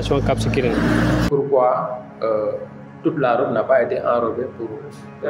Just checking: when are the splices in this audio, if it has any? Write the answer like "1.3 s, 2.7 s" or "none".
1.3 s